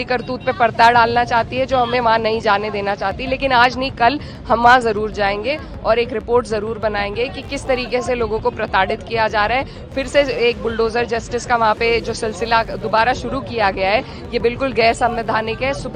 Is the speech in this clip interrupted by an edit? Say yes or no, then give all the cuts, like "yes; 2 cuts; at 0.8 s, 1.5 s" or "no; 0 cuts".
no; 0 cuts